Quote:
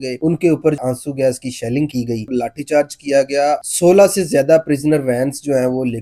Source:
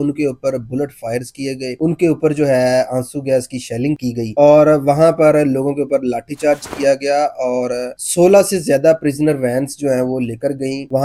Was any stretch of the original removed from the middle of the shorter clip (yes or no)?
yes